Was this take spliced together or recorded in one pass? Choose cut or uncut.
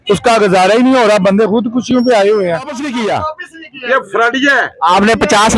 cut